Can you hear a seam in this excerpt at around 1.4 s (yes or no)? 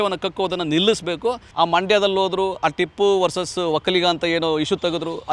yes